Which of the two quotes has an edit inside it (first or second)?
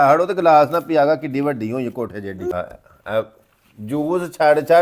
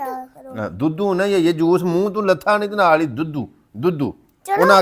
first